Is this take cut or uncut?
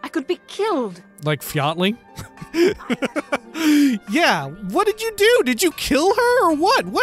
cut